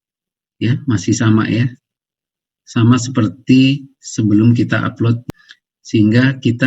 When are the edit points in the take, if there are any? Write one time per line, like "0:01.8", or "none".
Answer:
0:05.2